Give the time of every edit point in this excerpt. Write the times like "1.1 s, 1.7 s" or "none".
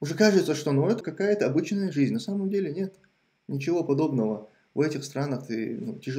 1.1 s

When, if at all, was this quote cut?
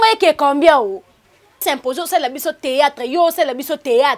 1.6 s

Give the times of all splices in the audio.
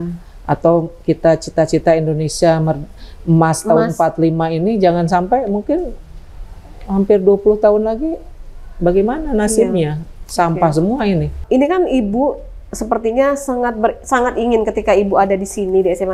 11.4 s

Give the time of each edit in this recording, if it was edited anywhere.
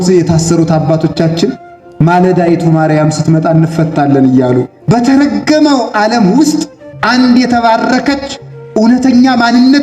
4.7 s

